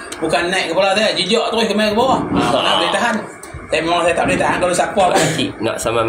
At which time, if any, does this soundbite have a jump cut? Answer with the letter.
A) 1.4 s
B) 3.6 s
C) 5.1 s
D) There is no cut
C